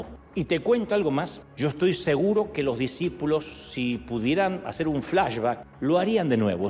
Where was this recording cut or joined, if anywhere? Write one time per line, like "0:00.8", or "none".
0:05.6